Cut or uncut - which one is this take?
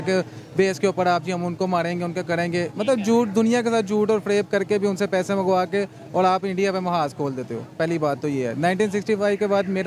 cut